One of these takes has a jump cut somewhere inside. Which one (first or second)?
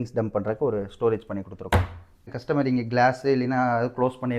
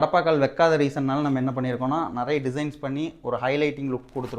first